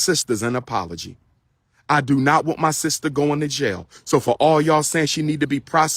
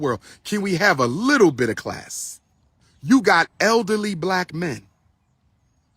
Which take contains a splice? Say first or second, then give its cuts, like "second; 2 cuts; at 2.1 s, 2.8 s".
second; 1 cut; at 2.9 s